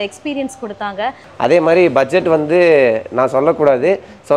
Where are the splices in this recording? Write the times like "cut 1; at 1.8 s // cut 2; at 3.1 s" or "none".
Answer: cut 1; at 1.2 s